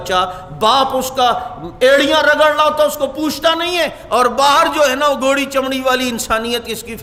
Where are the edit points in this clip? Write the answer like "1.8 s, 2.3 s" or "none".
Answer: none